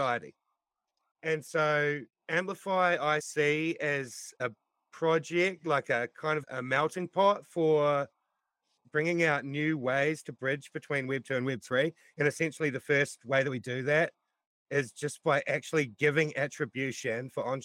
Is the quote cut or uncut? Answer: cut